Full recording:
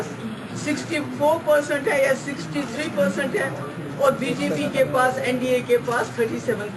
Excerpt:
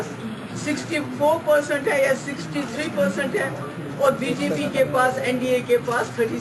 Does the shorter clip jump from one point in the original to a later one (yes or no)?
no